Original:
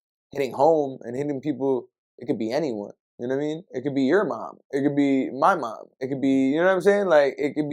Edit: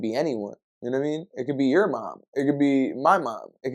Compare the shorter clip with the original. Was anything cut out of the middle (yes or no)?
no